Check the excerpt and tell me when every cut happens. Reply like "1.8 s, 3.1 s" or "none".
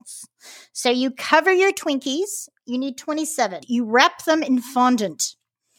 3.6 s